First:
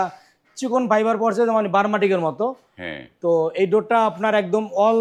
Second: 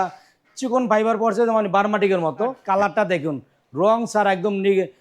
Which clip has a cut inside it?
second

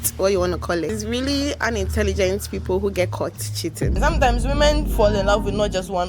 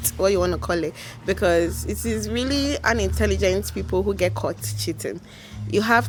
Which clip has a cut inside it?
first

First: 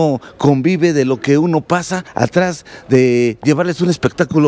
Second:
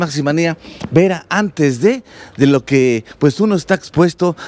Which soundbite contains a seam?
first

